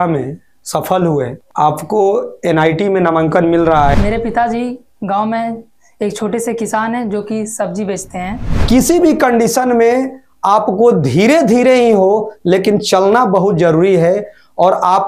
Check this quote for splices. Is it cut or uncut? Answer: cut